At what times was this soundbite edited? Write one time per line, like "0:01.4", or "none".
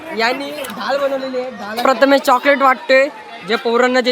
0:01.8